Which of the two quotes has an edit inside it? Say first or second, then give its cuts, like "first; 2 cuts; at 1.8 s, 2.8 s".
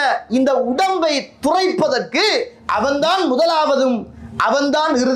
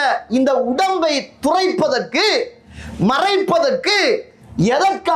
first; 1 cut; at 2.6 s